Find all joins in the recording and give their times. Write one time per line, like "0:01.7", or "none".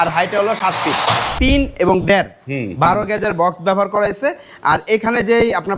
0:01.3